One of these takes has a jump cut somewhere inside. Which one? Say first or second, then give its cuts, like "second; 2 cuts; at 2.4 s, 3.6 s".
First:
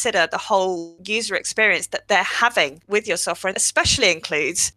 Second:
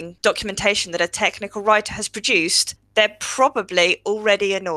first; 1 cut; at 3.6 s